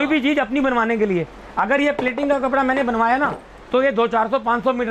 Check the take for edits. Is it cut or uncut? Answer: uncut